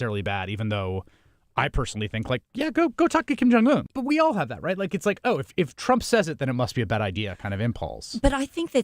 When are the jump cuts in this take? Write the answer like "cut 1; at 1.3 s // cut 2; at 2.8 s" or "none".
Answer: cut 1; at 3.9 s

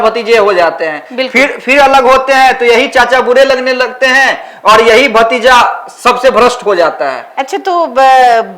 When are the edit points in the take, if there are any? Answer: none

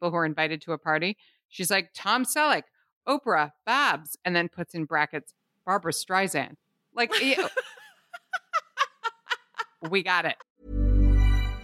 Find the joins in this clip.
cut 1; at 10.5 s

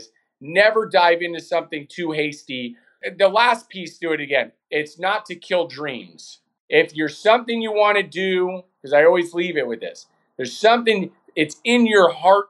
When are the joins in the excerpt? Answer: none

